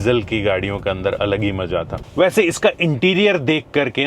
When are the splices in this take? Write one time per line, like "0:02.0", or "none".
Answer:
0:02.1